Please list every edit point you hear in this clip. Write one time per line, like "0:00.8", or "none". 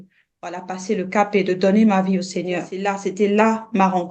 0:02.7